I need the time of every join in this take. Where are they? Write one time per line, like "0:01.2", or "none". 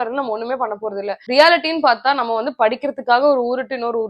0:01.2